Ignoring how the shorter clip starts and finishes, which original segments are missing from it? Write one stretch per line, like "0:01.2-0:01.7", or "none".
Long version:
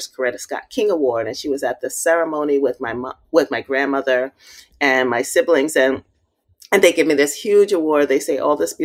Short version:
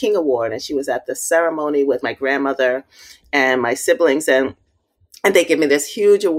0:02.8-0:03.5